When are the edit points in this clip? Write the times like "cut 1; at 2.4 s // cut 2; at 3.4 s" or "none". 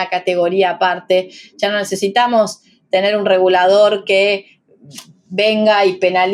none